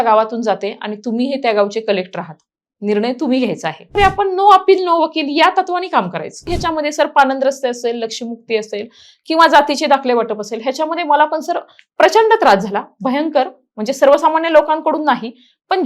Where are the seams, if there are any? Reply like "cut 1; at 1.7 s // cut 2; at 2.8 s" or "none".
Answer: cut 1; at 4.0 s // cut 2; at 6.5 s